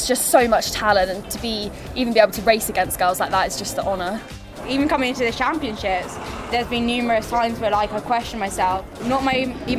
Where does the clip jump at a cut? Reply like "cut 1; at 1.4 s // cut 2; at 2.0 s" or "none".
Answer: cut 1; at 4.3 s // cut 2; at 9.0 s